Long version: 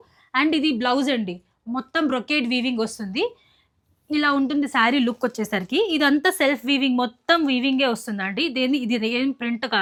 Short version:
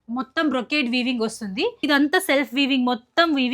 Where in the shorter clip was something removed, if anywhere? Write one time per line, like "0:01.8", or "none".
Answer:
0:01.8